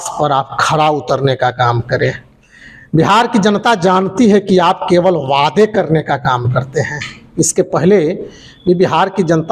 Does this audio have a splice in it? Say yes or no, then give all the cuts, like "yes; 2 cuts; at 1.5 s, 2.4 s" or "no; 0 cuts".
no; 0 cuts